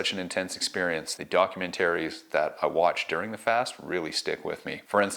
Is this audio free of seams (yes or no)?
no